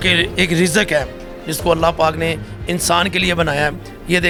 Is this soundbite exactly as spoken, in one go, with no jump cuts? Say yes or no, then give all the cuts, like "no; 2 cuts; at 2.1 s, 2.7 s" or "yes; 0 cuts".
yes; 0 cuts